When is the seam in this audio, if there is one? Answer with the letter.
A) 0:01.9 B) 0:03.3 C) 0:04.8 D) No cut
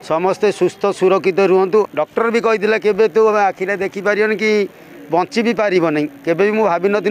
A